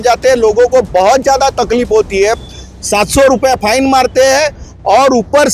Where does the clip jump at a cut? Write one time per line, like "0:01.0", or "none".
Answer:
none